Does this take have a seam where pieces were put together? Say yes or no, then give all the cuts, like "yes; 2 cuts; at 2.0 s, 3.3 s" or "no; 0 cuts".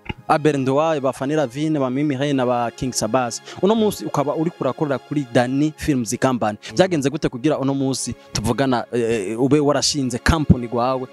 no; 0 cuts